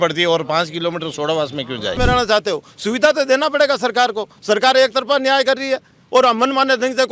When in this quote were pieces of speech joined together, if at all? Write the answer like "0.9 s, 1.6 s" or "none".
2.0 s